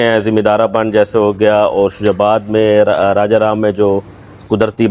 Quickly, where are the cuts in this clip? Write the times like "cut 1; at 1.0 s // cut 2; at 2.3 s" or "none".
none